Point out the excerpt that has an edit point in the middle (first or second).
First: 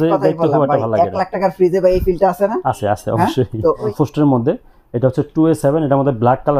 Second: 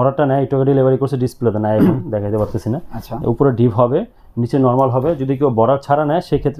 first